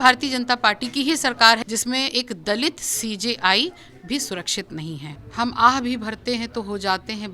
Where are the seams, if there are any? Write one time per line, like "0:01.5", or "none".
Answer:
0:01.6
0:05.2